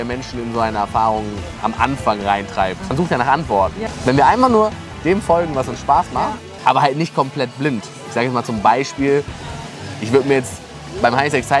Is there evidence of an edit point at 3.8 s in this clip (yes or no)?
yes